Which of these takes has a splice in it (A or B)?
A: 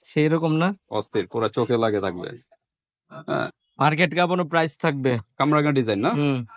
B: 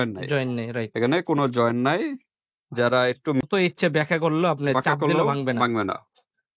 B